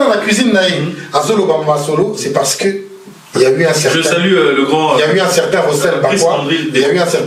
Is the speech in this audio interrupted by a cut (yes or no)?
no